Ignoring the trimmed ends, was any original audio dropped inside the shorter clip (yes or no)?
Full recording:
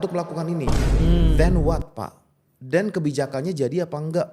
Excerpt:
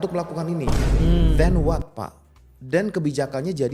no